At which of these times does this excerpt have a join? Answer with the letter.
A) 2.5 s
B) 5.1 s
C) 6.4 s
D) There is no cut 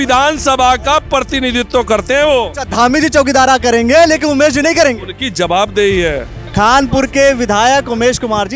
C